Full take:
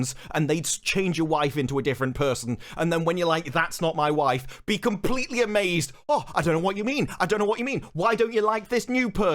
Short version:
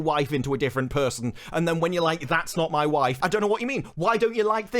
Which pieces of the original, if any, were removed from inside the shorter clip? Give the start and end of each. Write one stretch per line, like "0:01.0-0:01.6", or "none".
0:04.4-0:07.2